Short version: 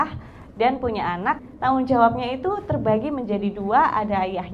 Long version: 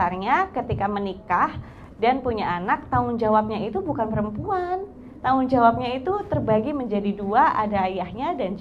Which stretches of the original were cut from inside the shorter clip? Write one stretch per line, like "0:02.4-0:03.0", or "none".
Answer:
0:02.8-0:05.0